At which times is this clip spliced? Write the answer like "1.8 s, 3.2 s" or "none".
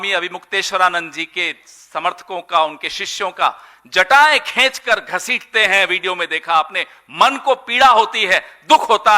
none